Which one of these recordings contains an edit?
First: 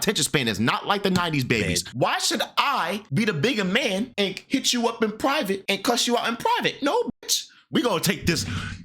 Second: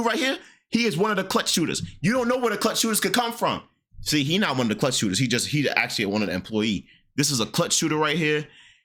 first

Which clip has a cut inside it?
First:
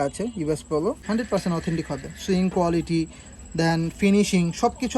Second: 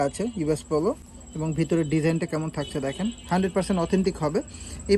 first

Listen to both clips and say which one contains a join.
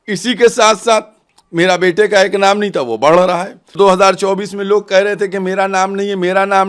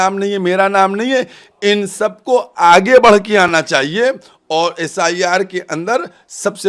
first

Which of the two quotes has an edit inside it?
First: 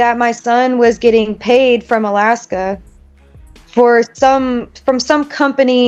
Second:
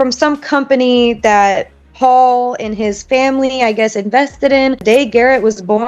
second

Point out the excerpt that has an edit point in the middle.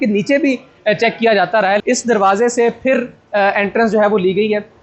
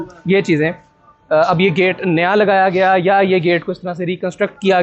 first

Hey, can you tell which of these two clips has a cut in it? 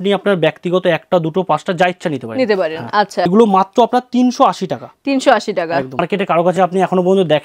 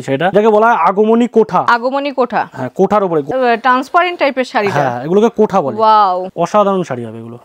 first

